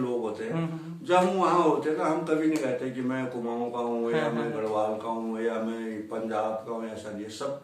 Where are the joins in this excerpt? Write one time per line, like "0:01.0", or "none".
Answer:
none